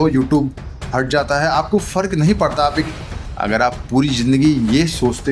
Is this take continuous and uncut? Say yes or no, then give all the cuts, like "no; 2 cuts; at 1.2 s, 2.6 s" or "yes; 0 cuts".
no; 1 cut; at 3.0 s